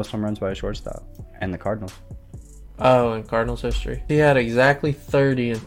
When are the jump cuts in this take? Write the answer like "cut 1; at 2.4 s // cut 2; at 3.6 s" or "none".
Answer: cut 1; at 1.2 s // cut 2; at 4.0 s